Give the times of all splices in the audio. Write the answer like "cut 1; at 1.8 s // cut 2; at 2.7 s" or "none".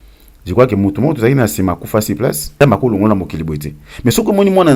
cut 1; at 2.5 s